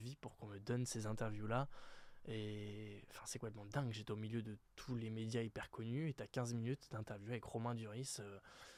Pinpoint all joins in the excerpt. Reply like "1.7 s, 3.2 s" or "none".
none